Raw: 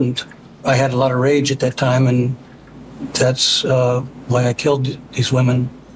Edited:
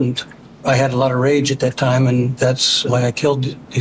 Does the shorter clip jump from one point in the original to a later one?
yes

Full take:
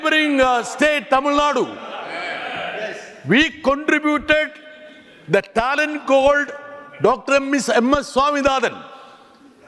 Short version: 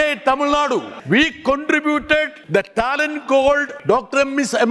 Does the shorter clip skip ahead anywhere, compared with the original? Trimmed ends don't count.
yes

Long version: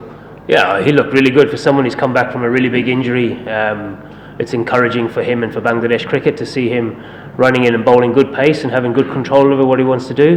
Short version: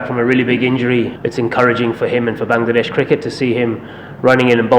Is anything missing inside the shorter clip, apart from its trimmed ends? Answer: yes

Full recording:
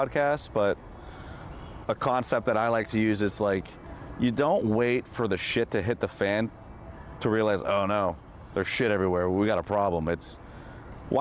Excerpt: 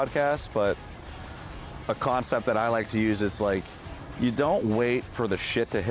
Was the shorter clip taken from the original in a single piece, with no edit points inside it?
yes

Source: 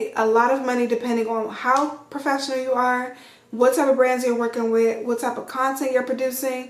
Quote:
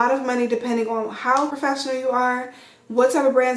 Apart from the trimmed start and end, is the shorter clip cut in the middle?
yes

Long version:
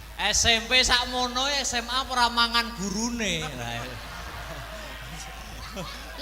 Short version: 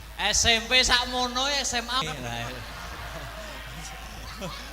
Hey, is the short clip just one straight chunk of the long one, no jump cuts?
no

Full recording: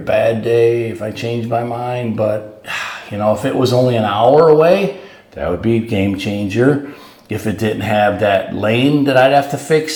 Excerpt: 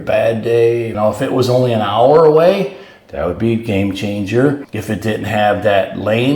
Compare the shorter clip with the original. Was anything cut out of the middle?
yes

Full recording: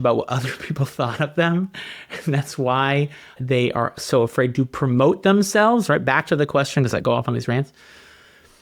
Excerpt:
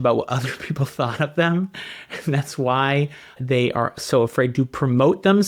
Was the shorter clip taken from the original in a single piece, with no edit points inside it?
yes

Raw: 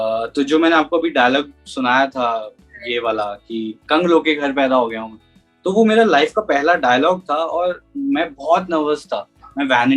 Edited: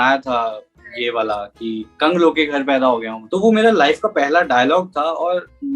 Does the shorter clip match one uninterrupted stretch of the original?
no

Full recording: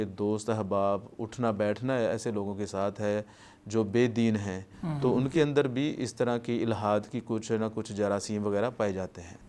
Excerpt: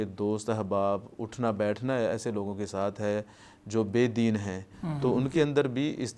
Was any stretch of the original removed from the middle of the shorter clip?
no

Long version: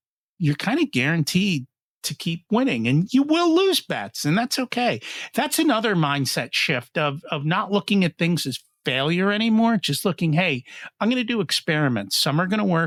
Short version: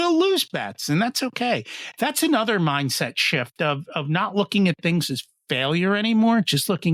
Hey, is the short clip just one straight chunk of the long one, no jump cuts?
yes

